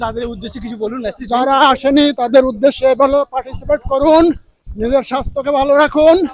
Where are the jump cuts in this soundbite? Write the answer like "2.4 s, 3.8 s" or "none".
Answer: none